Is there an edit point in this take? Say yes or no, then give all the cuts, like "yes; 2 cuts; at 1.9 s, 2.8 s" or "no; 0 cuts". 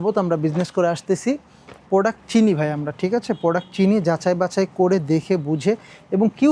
no; 0 cuts